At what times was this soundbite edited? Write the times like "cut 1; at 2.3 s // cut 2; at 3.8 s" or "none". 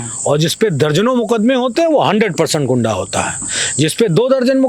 none